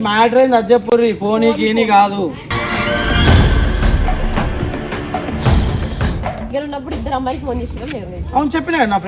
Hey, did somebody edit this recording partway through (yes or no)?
yes